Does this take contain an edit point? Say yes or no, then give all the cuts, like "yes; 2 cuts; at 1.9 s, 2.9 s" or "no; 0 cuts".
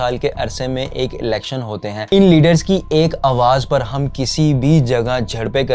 yes; 1 cut; at 2.0 s